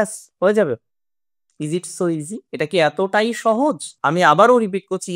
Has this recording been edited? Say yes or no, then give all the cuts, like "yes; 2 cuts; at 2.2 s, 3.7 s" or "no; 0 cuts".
yes; 1 cut; at 3.9 s